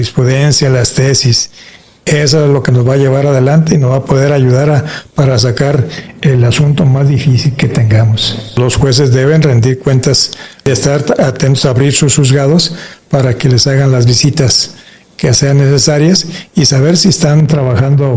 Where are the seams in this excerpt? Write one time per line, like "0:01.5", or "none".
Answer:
0:08.6
0:10.6